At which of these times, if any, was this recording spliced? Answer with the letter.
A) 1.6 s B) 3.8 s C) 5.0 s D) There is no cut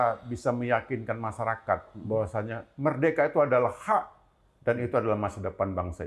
D